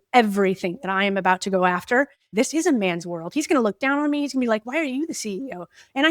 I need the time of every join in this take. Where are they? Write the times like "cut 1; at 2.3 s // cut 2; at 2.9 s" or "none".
cut 1; at 2.2 s